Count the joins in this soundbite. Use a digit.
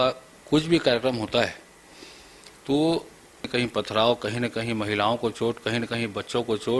1